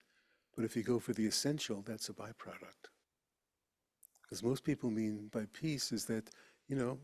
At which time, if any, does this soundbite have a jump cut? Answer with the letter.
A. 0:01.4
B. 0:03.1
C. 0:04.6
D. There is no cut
B